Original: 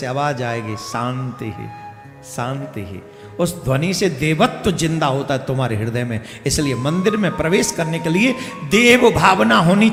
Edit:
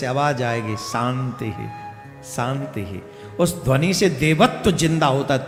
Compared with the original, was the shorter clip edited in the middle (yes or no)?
no